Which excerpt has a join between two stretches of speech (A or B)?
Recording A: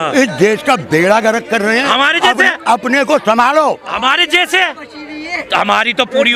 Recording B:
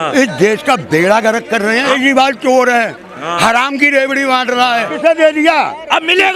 B